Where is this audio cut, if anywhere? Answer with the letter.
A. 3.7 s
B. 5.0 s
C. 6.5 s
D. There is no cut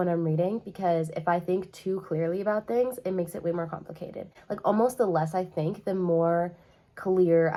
D